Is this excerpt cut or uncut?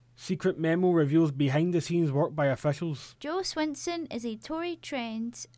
cut